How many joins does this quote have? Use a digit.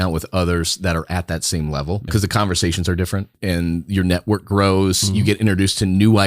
2